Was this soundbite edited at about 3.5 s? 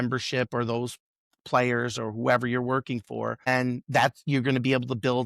yes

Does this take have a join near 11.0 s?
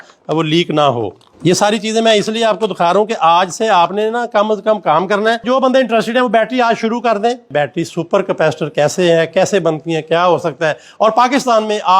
no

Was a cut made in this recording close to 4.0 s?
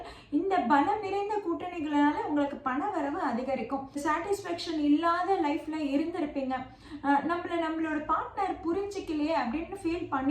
yes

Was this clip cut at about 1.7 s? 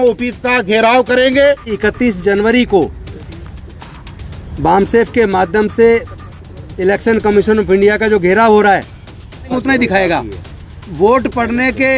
yes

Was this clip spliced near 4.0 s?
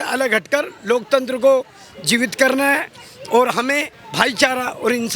yes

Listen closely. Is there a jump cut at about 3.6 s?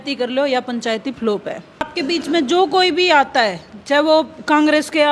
no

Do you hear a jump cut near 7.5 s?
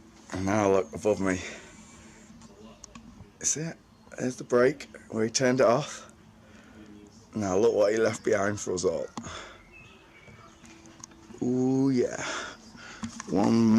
yes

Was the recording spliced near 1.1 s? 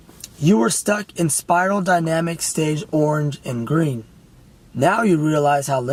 no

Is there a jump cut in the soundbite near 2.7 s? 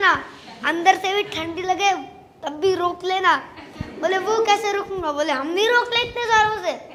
no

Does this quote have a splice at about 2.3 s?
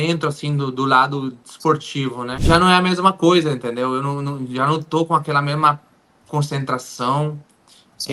yes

